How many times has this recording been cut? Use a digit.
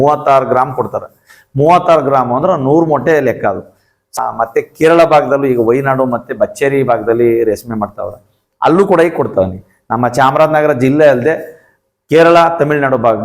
1